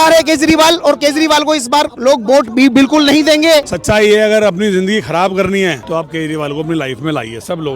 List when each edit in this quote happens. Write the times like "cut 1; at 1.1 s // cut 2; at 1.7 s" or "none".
cut 1; at 3.7 s // cut 2; at 5.8 s

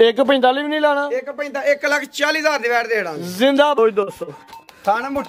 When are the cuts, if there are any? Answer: cut 1; at 3.8 s

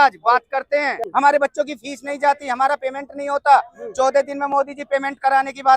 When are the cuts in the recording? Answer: cut 1; at 1.0 s

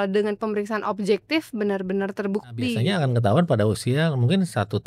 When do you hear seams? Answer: cut 1; at 2.8 s

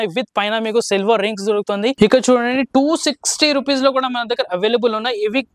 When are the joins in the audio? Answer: cut 1; at 1.9 s

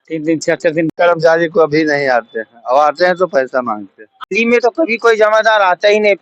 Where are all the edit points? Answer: cut 1; at 0.9 s // cut 2; at 4.3 s

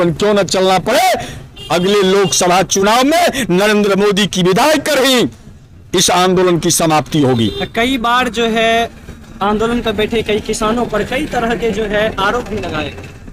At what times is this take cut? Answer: none

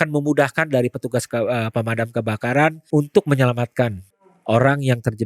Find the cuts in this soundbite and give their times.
cut 1; at 2.8 s // cut 2; at 4.3 s

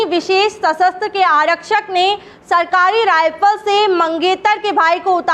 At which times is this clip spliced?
none

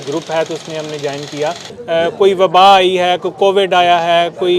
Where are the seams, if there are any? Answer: cut 1; at 1.7 s

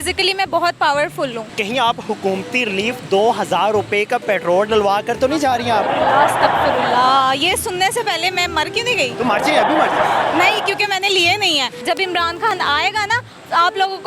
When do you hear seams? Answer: cut 1; at 1.5 s // cut 2; at 11.8 s

